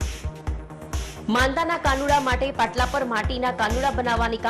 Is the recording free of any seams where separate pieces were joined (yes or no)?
no